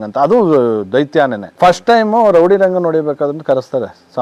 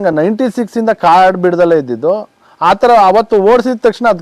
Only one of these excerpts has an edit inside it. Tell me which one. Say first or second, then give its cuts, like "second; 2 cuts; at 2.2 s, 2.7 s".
first; 1 cut; at 1.4 s